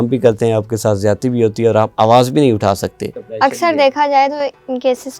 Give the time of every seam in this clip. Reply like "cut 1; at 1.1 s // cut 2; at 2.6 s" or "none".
cut 1; at 3.4 s